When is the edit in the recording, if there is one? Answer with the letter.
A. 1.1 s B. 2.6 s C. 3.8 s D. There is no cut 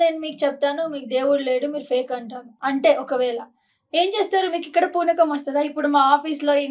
B